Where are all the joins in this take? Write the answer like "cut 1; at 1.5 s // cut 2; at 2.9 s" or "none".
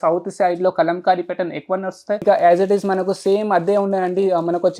cut 1; at 2.2 s